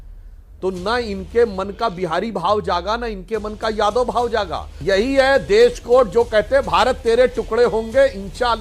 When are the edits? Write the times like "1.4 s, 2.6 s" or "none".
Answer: 4.7 s

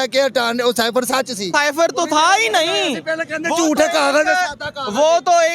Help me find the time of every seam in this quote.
1.4 s

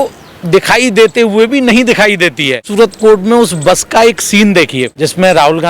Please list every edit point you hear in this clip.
2.7 s, 4.9 s

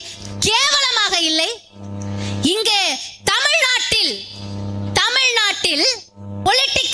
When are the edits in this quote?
none

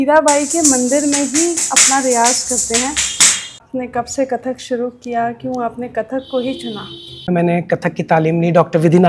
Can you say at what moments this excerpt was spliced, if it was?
3.6 s, 7.3 s

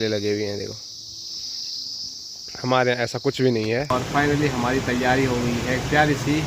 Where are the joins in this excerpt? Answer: 3.9 s

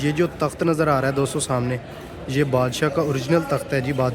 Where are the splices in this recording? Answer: none

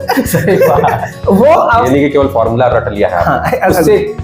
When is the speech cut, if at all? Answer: 1.9 s

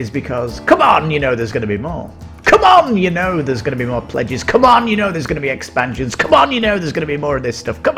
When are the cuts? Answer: none

